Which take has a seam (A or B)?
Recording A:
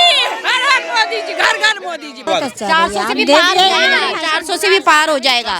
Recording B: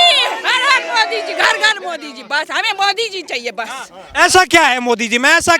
A